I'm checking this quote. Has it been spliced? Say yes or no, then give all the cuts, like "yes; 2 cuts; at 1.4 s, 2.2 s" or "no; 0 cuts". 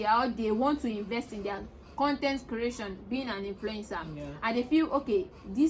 no; 0 cuts